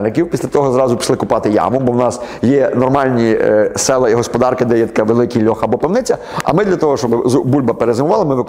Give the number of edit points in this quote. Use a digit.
0